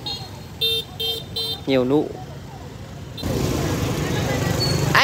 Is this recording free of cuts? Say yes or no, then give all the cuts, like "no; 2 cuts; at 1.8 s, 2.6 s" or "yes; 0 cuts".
no; 1 cut; at 3.2 s